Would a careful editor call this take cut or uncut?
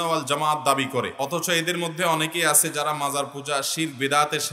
cut